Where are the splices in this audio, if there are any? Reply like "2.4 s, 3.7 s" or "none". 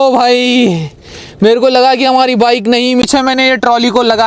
3.0 s